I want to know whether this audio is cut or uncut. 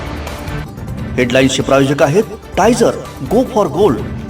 cut